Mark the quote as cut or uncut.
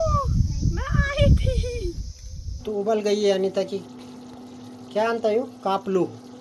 cut